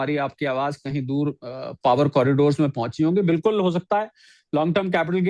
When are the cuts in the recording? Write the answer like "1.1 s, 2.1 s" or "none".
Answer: none